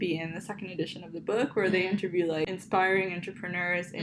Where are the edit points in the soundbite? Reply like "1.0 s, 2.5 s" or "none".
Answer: 2.5 s